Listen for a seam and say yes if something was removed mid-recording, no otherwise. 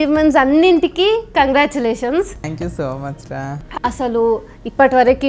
yes